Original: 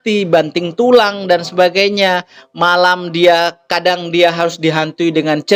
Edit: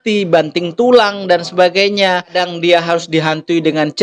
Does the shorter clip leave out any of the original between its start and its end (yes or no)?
yes